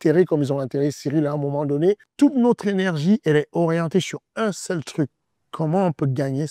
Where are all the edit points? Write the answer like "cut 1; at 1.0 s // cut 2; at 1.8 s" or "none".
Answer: cut 1; at 2.1 s